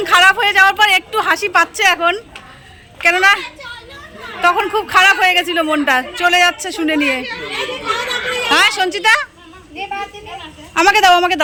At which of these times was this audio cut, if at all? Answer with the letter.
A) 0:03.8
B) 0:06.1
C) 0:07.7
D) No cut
D